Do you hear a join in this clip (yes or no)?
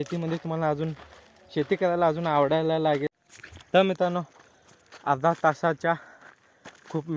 yes